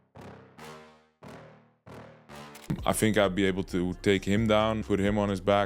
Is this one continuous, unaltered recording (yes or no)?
no